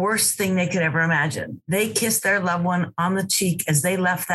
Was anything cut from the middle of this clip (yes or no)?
no